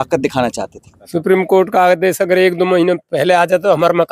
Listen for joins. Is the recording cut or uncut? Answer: cut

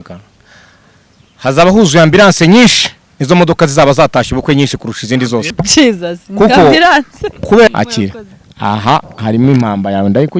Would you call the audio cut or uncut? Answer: cut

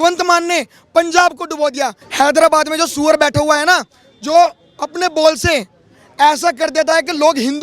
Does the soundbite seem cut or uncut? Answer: cut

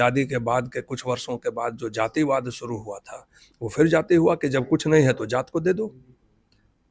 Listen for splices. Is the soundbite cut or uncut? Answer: uncut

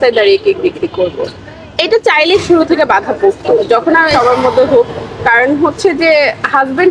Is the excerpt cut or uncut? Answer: cut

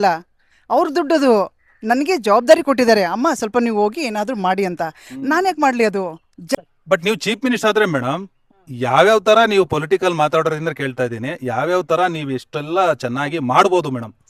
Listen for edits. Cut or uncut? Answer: cut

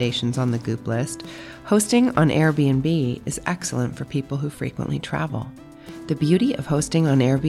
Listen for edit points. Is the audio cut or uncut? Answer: uncut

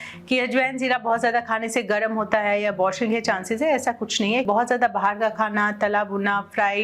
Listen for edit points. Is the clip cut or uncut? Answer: cut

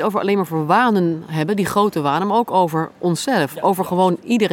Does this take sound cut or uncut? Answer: uncut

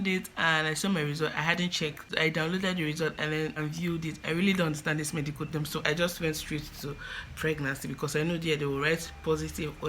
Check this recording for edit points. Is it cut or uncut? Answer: cut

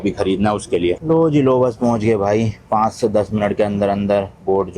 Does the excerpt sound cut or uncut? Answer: cut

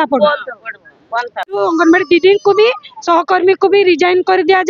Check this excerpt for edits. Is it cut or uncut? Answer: cut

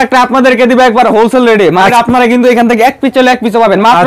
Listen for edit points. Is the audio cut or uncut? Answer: cut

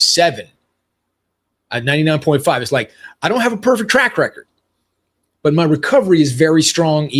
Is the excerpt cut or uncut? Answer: uncut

